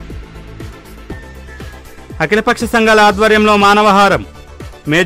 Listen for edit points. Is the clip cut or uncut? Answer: uncut